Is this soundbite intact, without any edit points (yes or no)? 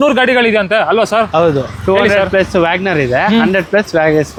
yes